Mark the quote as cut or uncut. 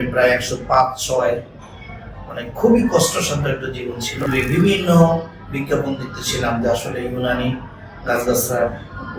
cut